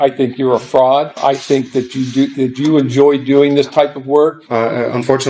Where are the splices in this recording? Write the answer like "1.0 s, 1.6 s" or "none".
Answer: 1.2 s, 4.4 s